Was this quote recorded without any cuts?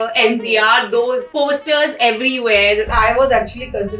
no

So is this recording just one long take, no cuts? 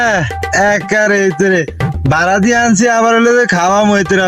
yes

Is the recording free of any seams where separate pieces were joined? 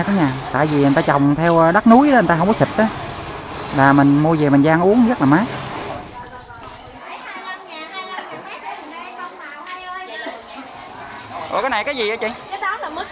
no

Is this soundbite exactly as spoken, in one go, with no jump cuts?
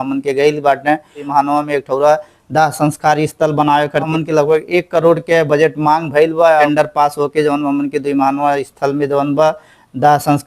no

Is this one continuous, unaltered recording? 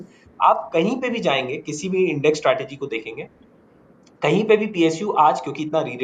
yes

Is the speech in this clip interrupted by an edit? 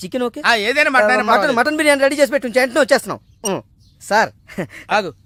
no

